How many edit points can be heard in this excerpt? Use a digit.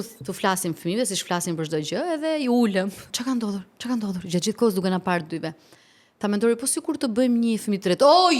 1